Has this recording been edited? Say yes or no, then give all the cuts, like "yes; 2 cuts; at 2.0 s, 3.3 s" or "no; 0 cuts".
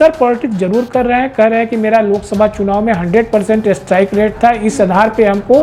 no; 0 cuts